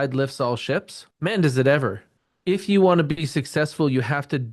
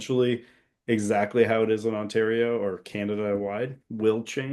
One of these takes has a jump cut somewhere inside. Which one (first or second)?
first